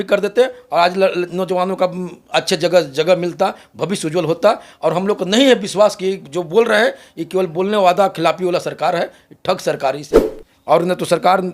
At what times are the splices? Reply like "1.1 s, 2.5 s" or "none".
10.1 s